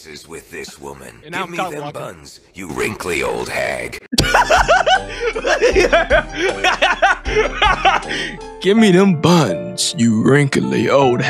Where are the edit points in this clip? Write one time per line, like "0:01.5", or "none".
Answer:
none